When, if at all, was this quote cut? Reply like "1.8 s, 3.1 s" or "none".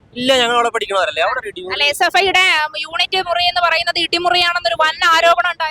none